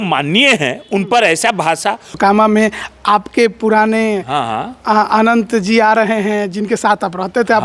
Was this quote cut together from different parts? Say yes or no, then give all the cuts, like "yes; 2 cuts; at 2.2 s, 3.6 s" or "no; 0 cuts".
yes; 1 cut; at 2.1 s